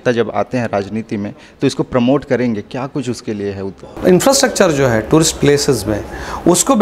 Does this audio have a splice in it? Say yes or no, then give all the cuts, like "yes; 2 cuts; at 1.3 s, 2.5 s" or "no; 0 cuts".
yes; 1 cut; at 3.7 s